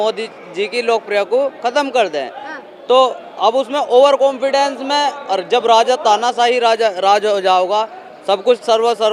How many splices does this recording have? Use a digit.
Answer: 0